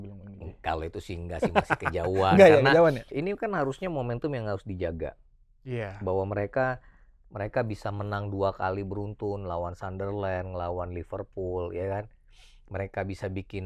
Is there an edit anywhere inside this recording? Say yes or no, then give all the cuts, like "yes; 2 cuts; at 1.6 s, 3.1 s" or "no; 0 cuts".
yes; 1 cut; at 3.1 s